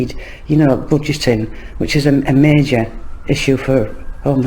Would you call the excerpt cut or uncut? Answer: uncut